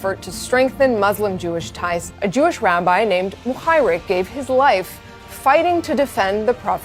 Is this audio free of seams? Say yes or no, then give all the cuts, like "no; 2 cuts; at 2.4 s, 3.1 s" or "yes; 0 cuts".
yes; 0 cuts